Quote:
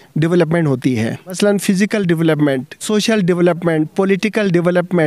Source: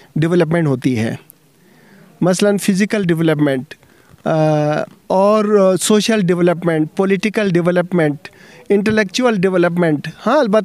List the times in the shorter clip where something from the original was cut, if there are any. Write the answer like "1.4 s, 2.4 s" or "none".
1.4 s, 2.8 s